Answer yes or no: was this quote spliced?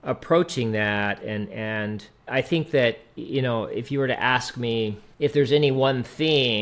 yes